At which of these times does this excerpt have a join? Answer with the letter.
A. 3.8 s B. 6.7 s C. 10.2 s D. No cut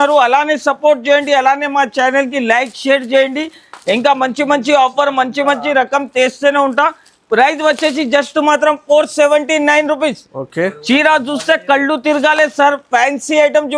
D